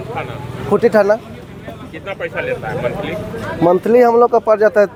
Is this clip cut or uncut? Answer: uncut